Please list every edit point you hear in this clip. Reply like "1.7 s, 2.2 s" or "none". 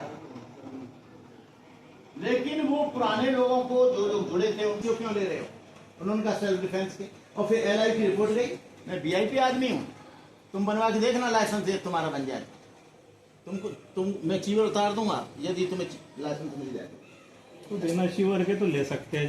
4.8 s